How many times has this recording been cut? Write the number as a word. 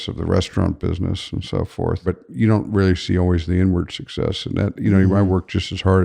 one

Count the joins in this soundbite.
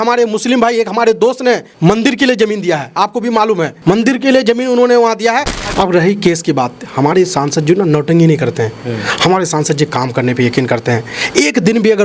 three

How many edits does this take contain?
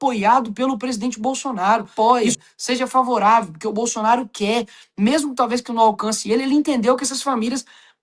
one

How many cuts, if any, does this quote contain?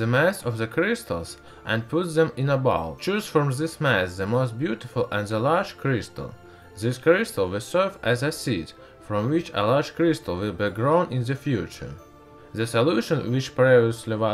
zero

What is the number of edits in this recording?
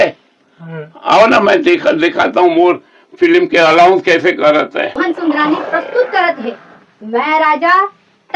one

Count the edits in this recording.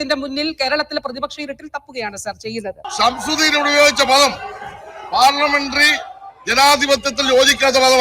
one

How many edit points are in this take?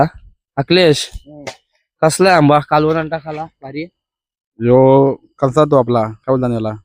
zero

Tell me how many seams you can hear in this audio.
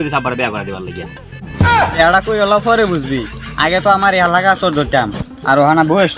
one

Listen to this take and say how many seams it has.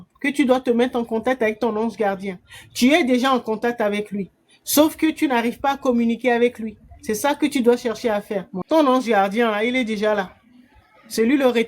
one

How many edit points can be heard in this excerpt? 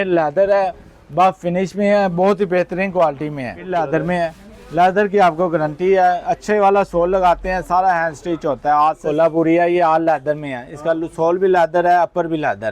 two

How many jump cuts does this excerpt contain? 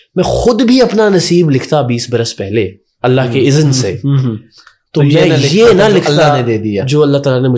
zero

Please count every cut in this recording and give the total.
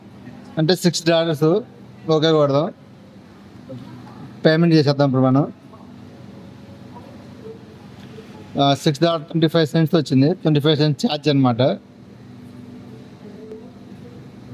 zero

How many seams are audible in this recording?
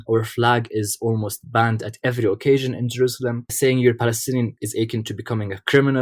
two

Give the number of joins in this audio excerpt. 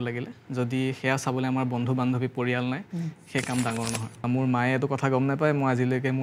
one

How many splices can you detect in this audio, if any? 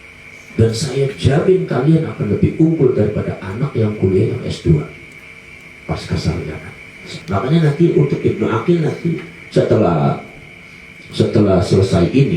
one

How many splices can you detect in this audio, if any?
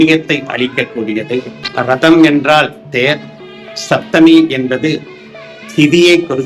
one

